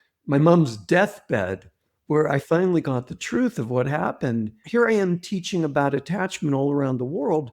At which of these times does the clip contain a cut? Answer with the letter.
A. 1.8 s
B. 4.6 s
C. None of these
B